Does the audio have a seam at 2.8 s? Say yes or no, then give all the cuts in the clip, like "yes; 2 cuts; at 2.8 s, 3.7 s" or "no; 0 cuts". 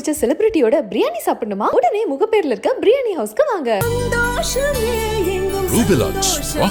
no; 0 cuts